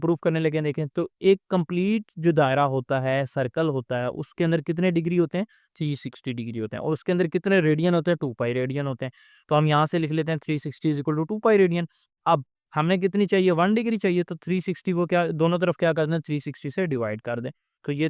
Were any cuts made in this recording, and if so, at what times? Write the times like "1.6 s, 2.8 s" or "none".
none

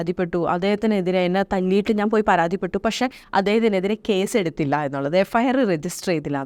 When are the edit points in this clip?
none

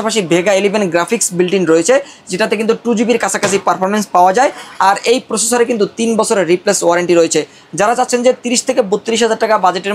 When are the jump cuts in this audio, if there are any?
none

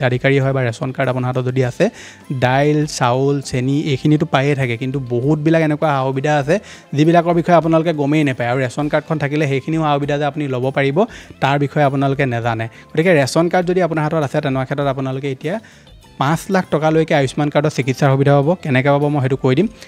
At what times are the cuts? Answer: none

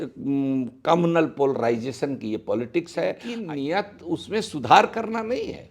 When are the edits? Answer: 3.3 s

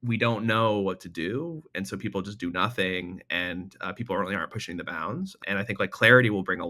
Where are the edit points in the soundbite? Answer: 5.4 s

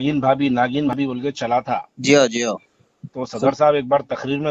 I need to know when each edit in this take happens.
0.9 s

